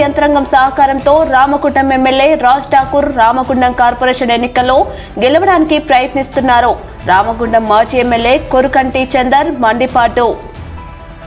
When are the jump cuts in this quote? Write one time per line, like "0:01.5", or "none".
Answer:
none